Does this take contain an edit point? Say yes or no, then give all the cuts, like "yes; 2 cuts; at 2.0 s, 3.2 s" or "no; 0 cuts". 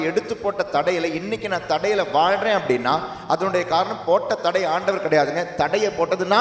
no; 0 cuts